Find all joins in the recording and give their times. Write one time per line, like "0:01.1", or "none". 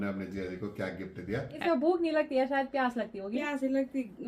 0:01.5